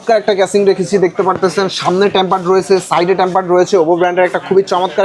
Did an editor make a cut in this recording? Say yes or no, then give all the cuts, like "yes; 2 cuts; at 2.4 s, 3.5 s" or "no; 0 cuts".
no; 0 cuts